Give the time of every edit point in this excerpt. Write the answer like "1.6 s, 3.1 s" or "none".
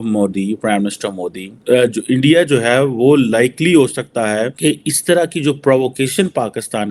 1.5 s, 4.5 s